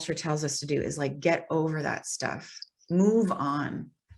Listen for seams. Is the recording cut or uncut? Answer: uncut